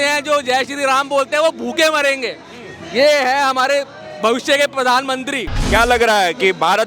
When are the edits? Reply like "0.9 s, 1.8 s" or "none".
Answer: 5.5 s